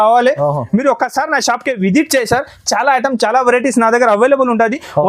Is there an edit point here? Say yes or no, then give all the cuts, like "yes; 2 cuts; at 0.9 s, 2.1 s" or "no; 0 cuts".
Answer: no; 0 cuts